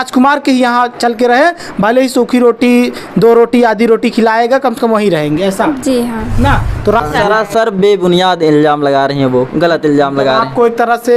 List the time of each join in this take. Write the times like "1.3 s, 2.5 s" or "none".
7.0 s